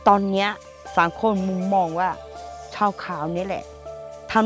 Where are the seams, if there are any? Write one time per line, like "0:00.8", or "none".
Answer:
none